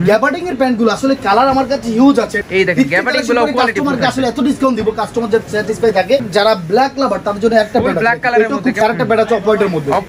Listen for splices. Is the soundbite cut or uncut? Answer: cut